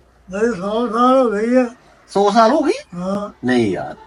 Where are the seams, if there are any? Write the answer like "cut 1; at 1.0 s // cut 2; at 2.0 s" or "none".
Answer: none

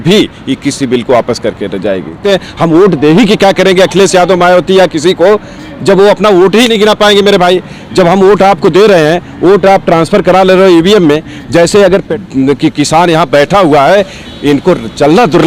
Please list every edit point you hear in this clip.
cut 1; at 2.2 s // cut 2; at 12.1 s

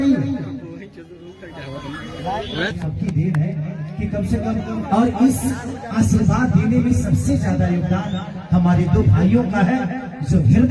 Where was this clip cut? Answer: cut 1; at 2.7 s

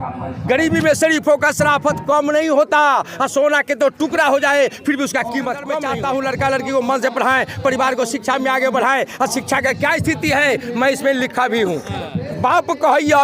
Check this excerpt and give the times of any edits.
cut 1; at 5.8 s

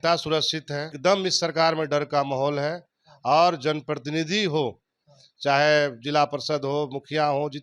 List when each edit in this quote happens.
cut 1; at 0.9 s

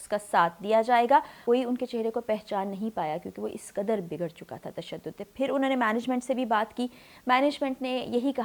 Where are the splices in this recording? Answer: cut 1; at 1.3 s

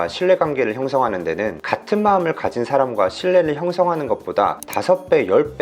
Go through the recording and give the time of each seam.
cut 1; at 1.6 s // cut 2; at 4.7 s

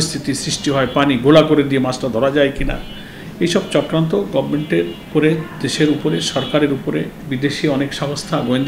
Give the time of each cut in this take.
cut 1; at 5.0 s // cut 2; at 7.2 s

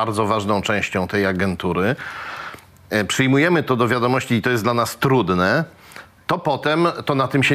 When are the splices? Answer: none

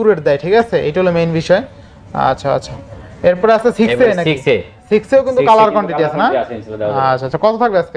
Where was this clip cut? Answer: none

